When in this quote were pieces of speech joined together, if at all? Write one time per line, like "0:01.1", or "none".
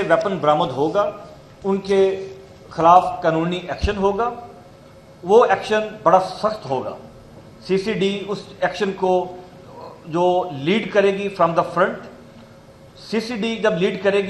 none